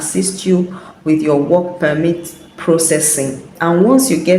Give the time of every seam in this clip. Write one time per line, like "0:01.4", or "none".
0:03.5